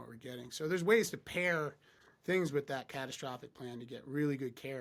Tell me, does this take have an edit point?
no; 0 cuts

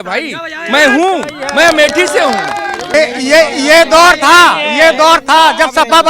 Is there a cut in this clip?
yes; 1 cut; at 2.9 s

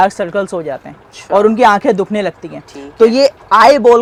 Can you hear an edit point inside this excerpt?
no; 0 cuts

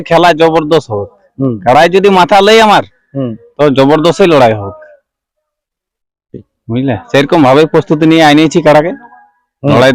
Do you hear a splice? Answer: no; 0 cuts

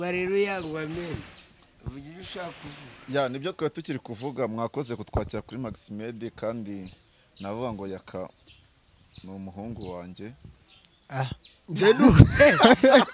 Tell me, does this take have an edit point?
no; 0 cuts

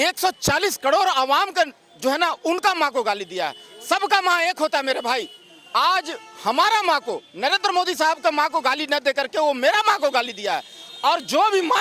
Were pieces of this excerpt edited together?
no; 0 cuts

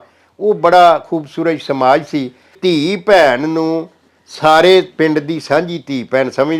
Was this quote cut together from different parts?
yes; 1 cut; at 2.5 s

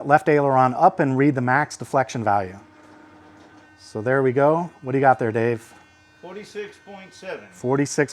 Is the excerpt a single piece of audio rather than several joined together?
yes; 0 cuts

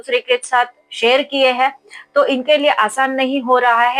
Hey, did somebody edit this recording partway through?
no; 0 cuts

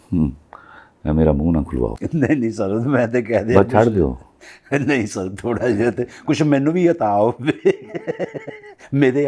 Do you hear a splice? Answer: no; 0 cuts

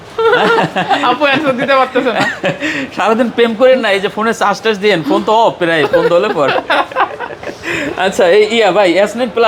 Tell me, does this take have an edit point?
no; 0 cuts

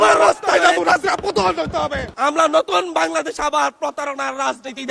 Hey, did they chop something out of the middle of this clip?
yes; 1 cut; at 2.1 s

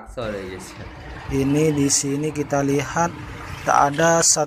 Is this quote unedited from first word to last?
yes; 0 cuts

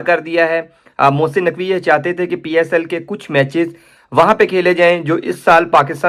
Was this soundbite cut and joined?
no; 0 cuts

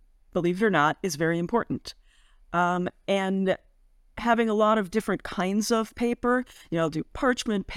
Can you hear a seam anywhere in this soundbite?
no; 0 cuts

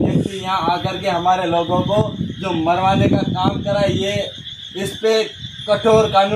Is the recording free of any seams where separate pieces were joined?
yes; 0 cuts

